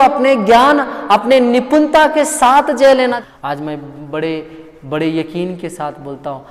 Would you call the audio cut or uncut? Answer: cut